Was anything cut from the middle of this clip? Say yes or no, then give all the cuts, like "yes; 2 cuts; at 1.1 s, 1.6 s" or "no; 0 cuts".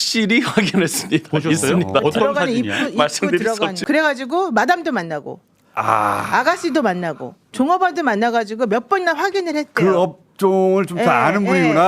yes; 1 cut; at 3.8 s